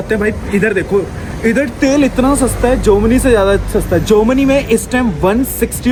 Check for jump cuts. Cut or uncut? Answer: uncut